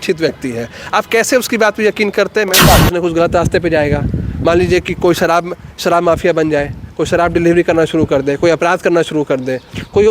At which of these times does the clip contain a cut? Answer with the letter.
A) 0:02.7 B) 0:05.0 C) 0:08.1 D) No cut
A